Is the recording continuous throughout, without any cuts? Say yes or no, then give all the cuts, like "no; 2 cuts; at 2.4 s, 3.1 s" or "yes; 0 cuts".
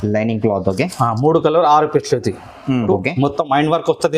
no; 1 cut; at 2.9 s